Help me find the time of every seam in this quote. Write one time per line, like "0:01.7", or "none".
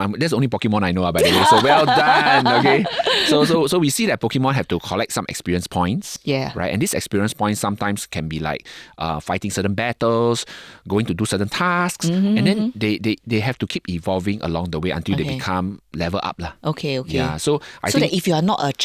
none